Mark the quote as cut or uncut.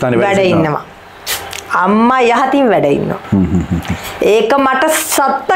uncut